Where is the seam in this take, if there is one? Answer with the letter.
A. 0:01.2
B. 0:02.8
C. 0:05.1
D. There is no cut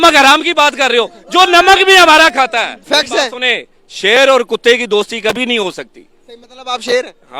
B